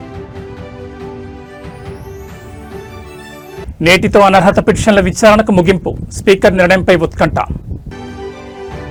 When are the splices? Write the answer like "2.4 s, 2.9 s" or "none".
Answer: none